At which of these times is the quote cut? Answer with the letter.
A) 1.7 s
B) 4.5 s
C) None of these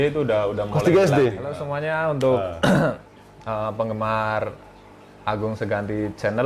A